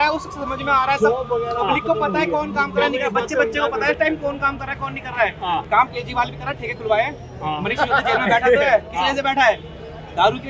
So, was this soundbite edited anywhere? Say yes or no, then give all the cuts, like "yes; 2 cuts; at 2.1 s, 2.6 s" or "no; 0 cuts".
no; 0 cuts